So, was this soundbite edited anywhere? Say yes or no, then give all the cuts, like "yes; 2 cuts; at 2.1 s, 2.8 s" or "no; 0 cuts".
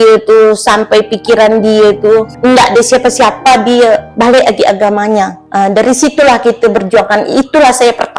yes; 3 cuts; at 2.3 s, 4.1 s, 5.4 s